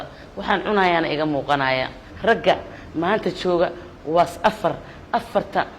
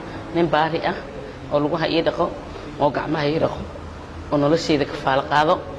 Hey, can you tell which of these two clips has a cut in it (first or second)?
first